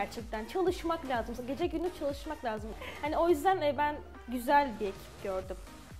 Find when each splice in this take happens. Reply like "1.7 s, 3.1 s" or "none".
2.7 s